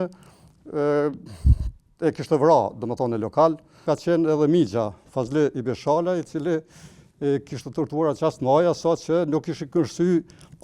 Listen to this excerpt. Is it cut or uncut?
cut